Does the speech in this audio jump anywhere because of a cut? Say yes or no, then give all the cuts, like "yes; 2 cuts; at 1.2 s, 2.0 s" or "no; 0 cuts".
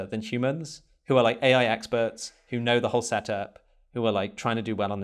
no; 0 cuts